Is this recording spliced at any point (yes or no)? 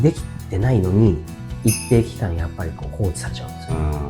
no